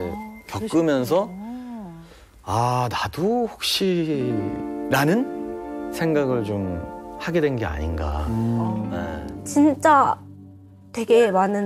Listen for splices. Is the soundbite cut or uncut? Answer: cut